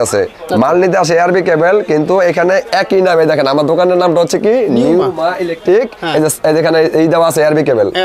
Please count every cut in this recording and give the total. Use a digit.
0